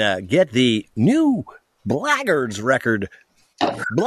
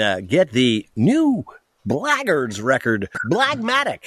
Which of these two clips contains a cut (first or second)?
second